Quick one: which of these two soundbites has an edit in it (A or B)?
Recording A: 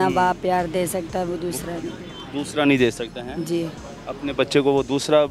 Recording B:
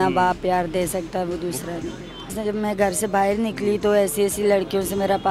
B